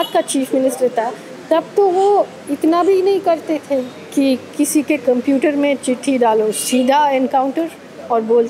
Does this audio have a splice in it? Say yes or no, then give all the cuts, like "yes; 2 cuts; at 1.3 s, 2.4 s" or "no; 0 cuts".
no; 0 cuts